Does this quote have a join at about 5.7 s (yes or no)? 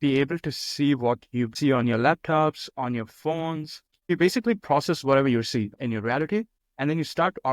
yes